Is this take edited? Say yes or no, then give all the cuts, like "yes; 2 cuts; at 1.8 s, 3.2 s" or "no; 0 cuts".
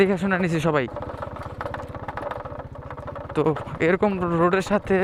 no; 0 cuts